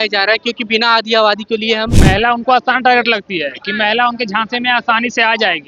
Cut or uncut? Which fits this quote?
cut